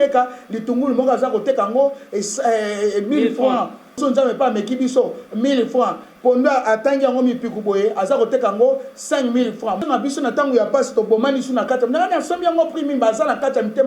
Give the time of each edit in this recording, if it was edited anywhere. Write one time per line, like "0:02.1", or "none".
0:04.0
0:09.8

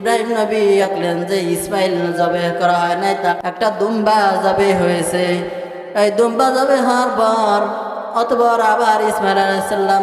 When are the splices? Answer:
0:00.9
0:02.1

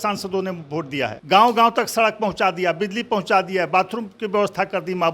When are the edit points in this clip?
0:01.2

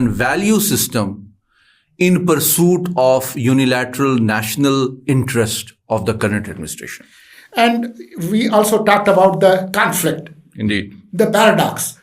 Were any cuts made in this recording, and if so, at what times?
none

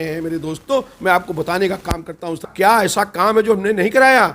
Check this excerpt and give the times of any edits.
0:02.4

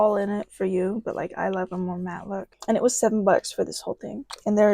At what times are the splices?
0:02.5

